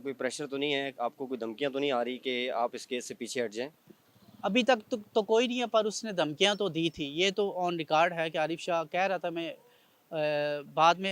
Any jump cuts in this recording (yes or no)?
no